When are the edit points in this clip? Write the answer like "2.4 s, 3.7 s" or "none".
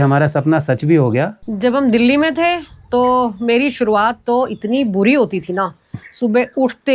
1.4 s